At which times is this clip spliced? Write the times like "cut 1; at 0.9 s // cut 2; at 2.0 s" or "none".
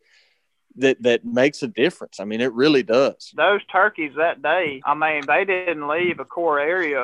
cut 1; at 3.2 s // cut 2; at 4.8 s // cut 3; at 5.6 s